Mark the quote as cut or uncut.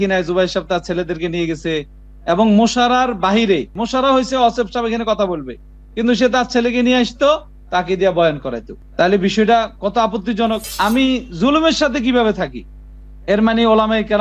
cut